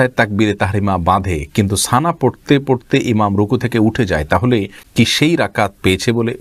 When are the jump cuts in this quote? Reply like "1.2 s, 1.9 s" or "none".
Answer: 4.8 s

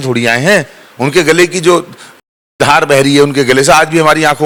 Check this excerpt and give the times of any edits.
none

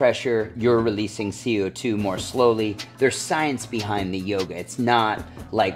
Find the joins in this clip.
none

